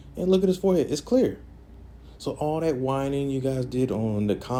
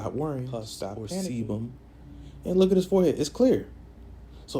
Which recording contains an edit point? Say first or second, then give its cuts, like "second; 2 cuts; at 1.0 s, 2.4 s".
second; 1 cut; at 1.1 s